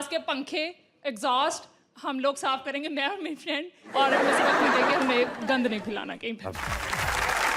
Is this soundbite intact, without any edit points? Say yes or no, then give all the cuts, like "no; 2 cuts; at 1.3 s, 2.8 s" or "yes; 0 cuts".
no; 1 cut; at 6.6 s